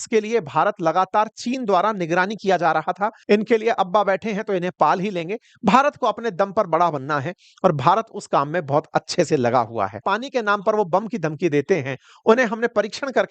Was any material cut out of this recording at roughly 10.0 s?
yes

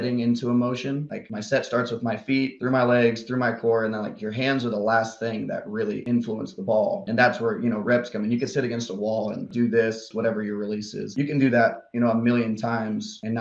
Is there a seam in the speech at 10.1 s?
yes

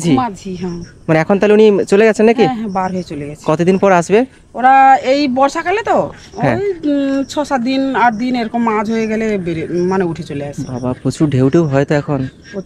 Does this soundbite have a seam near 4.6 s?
no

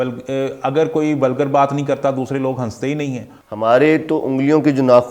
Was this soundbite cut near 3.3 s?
yes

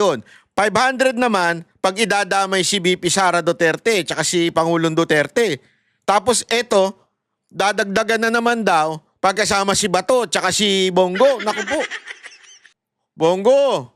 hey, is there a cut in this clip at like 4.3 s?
no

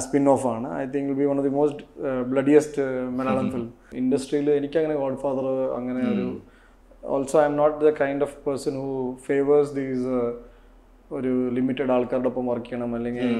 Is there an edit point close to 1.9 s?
no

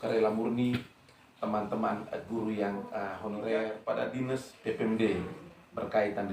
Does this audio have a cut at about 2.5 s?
no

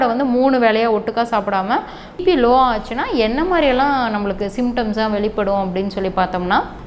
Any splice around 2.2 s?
yes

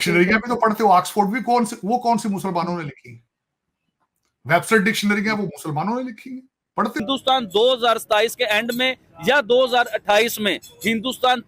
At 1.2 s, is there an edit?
no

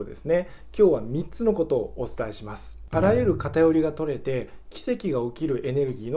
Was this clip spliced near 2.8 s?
yes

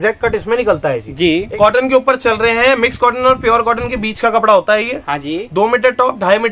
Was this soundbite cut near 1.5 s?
yes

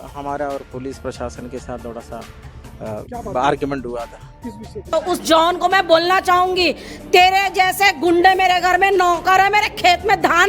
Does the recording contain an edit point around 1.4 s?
no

